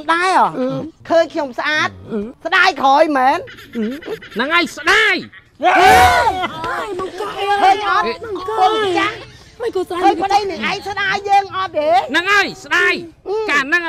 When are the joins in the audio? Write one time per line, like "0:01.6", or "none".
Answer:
0:00.9
0:02.4